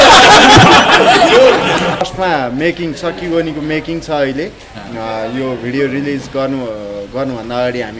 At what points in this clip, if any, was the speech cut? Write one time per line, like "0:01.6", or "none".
0:02.0